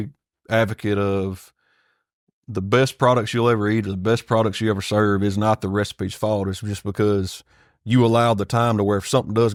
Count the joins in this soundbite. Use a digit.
0